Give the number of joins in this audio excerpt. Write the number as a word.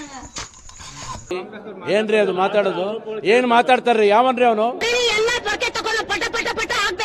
zero